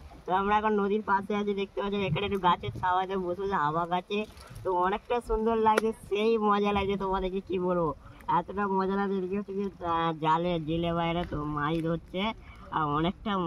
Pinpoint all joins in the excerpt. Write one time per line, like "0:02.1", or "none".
none